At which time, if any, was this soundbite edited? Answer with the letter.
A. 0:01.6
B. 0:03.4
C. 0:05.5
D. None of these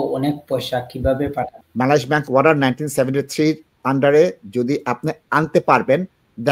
A